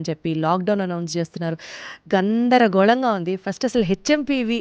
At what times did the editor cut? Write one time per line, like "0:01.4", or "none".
none